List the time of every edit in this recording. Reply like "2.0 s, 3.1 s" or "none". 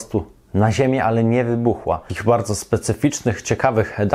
2.1 s